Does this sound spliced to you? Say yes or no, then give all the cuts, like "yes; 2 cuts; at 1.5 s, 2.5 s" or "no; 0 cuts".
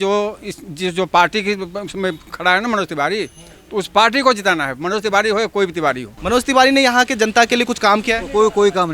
yes; 1 cut; at 6.1 s